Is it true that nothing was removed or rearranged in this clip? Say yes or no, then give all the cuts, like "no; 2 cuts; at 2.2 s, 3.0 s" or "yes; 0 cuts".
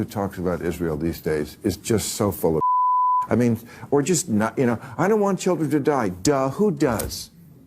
no; 1 cut; at 3.2 s